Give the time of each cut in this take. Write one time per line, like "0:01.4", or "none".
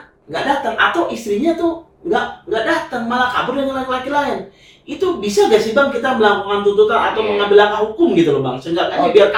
none